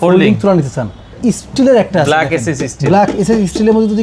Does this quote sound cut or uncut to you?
cut